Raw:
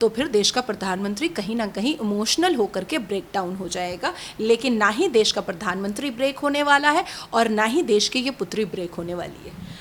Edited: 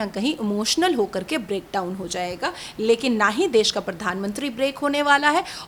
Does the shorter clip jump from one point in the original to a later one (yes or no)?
no